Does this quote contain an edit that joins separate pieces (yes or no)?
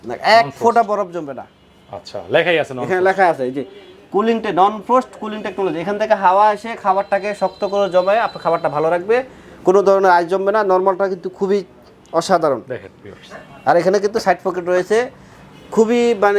no